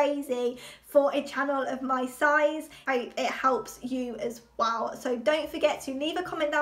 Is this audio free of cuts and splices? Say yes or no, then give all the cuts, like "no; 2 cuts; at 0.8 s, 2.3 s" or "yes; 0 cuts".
yes; 0 cuts